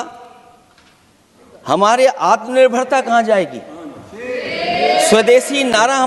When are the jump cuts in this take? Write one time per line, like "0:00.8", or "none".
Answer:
none

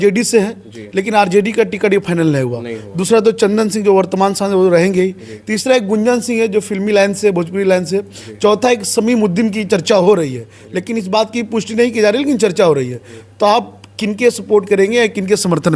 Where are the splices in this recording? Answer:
none

